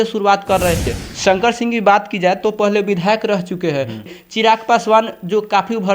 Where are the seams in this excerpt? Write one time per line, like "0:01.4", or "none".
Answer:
0:00.9
0:04.1

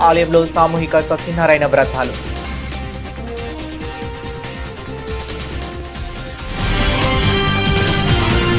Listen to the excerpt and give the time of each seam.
0:05.8

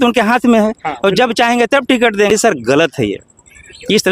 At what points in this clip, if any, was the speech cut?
0:02.3

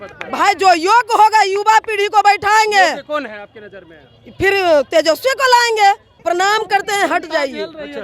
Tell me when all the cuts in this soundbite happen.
0:06.2

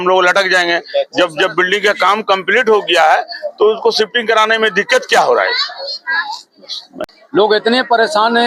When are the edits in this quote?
0:06.9

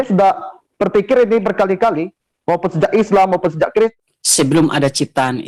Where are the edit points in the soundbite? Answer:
0:03.9

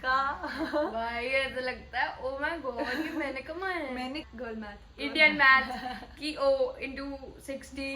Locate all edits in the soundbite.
0:04.3

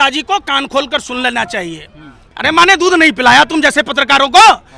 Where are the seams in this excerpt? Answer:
0:02.2

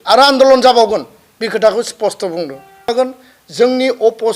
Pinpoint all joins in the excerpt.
0:02.9

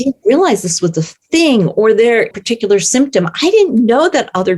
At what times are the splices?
0:02.3

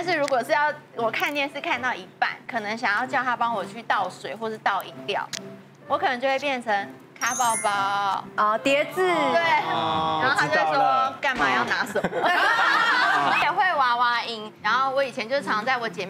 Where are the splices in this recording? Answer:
0:13.4

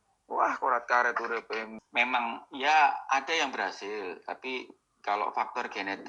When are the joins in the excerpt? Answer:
0:01.7

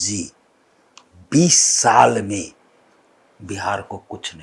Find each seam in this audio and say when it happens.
none

